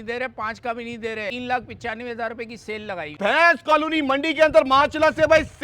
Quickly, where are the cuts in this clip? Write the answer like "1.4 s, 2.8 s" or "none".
1.3 s, 3.1 s